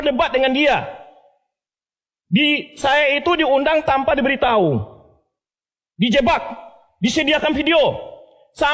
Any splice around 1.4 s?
no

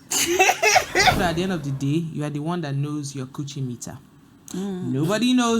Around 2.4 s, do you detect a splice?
no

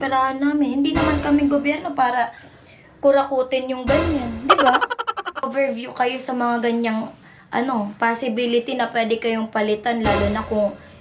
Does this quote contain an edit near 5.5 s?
yes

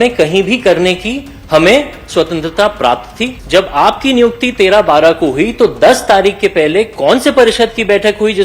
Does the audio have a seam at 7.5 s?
no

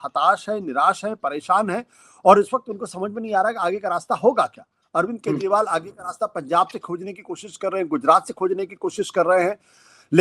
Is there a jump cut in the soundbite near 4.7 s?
no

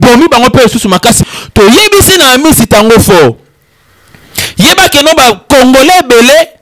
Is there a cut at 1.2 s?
yes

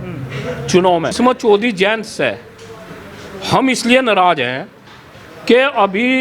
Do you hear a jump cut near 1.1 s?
yes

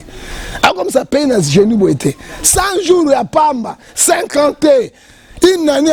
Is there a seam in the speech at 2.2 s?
no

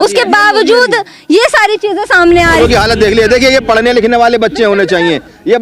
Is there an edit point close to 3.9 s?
no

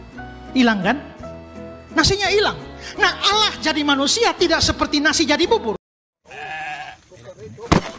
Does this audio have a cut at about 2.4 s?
no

